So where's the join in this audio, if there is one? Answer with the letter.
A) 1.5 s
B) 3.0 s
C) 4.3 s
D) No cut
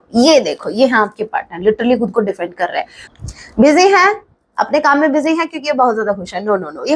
B